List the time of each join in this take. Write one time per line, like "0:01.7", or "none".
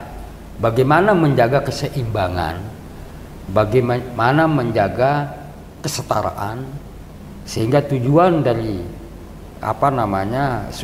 none